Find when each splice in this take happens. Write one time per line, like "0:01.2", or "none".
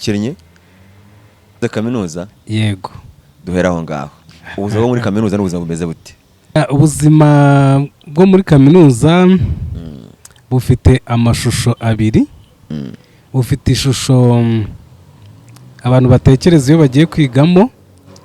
0:01.6
0:06.6